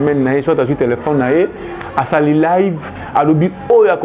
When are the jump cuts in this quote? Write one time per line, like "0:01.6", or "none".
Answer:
none